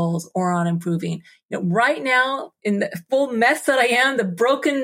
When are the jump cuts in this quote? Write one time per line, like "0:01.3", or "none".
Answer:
0:02.6